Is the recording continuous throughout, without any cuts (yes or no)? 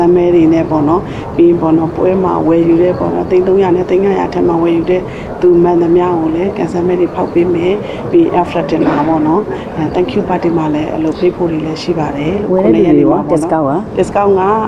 yes